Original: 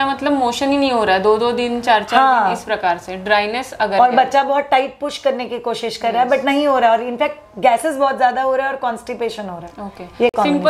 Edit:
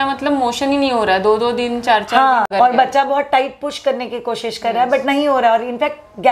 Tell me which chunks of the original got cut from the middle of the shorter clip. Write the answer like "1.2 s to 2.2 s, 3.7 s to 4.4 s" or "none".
2.5 s to 3.9 s